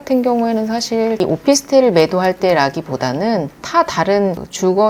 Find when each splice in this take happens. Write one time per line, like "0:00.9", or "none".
0:01.2